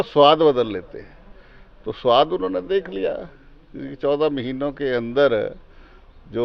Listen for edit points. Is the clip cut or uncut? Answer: uncut